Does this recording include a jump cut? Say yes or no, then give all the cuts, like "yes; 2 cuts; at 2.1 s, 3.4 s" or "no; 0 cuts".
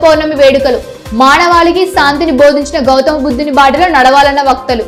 no; 0 cuts